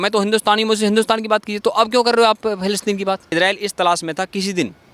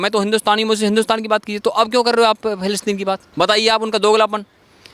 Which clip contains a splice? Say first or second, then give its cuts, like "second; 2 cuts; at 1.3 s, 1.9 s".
first; 1 cut; at 3.3 s